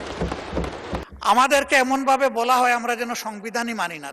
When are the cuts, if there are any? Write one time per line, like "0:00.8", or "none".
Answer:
0:01.1

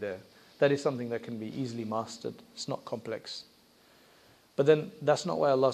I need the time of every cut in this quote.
none

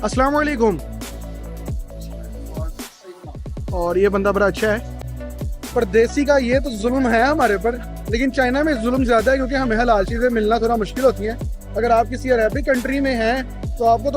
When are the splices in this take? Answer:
0:04.9

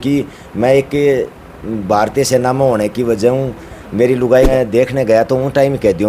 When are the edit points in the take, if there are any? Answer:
0:04.5

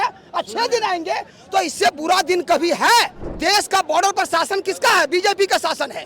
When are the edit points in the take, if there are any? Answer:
0:03.2

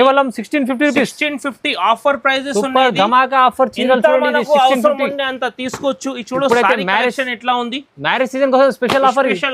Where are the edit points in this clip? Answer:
none

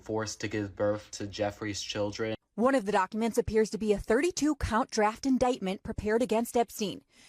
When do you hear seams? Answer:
0:02.4

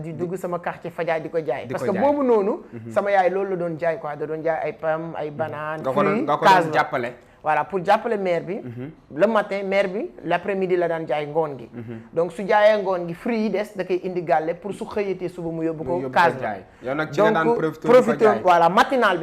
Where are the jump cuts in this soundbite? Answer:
none

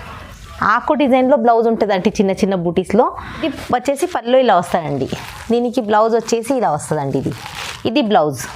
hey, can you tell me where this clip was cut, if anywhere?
0:03.3

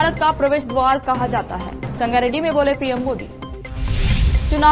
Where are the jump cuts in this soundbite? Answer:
none

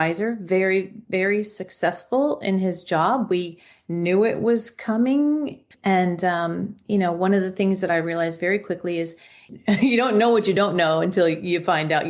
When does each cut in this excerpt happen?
0:05.7
0:09.5

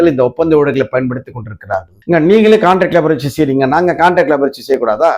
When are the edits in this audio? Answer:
0:01.9

